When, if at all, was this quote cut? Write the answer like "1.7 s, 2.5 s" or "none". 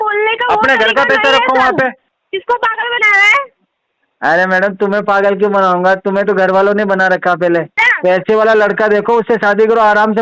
2.1 s, 7.8 s